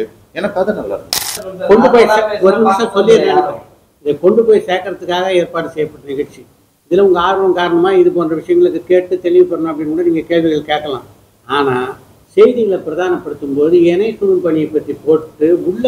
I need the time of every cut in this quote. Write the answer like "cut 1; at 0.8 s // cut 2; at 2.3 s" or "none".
cut 1; at 1.4 s